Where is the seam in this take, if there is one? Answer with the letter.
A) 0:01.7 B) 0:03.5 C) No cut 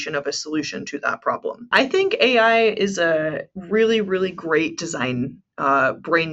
A